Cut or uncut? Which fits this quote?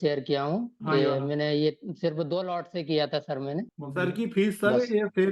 cut